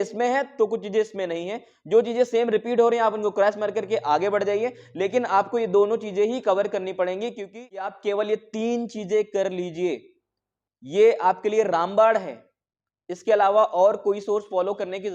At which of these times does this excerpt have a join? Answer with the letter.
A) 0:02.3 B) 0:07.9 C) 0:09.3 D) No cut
B